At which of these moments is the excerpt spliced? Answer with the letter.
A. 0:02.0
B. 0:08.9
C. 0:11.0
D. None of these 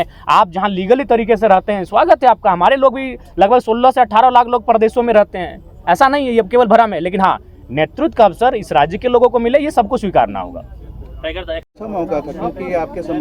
D